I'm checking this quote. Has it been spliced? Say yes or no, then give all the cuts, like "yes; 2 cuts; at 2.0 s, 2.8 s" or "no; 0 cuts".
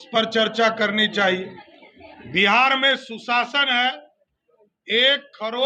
no; 0 cuts